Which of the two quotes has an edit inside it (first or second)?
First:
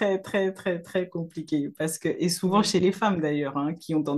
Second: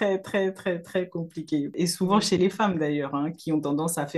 second